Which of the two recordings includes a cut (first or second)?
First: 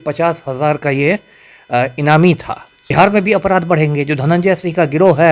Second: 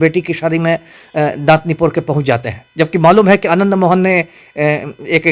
first